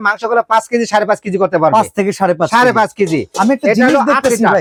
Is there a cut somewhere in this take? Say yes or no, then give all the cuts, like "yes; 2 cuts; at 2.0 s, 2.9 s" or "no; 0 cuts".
no; 0 cuts